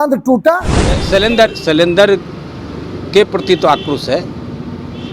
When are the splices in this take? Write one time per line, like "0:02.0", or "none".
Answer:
0:01.0

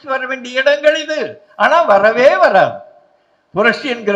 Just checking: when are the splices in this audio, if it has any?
none

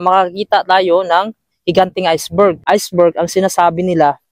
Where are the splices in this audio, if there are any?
0:02.6

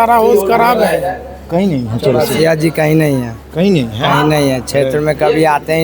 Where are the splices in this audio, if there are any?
none

